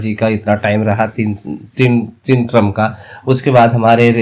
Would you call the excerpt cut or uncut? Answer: uncut